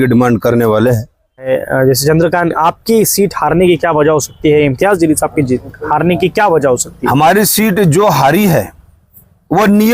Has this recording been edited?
yes; 1 cut; at 1.5 s

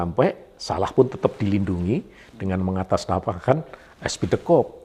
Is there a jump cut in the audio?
no; 0 cuts

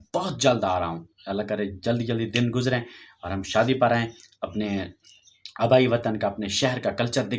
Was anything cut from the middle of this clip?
no; 0 cuts

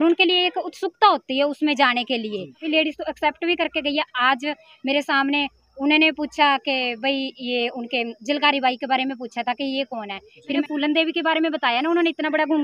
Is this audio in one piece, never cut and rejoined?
no; 2 cuts; at 2.6 s, 10.6 s

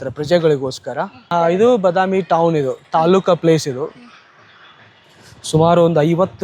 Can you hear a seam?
yes; 1 cut; at 1.2 s

